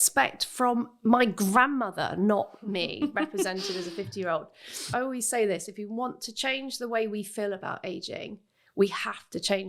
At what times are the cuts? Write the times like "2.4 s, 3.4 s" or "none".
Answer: 4.8 s